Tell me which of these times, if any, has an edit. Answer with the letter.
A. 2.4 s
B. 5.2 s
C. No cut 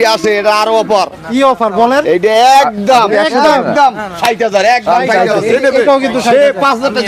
C